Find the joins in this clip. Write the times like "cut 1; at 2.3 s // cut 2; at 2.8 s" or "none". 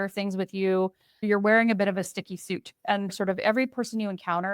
cut 1; at 1.2 s